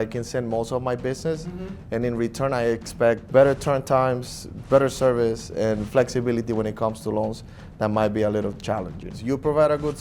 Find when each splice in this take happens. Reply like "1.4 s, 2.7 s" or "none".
3.2 s, 9.1 s